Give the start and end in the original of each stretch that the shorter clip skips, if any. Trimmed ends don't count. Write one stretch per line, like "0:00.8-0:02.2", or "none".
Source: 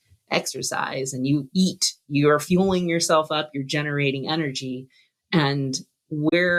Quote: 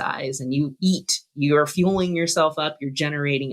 none

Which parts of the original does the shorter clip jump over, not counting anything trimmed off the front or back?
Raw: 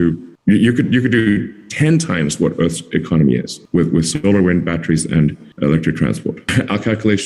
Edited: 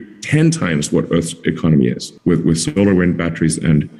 none

